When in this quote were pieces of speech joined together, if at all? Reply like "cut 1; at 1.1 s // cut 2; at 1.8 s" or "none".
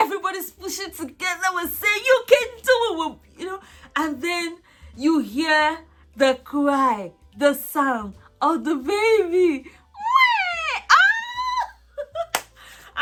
none